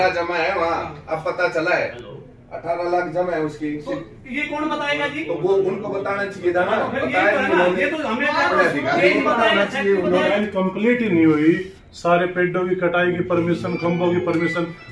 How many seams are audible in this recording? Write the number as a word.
one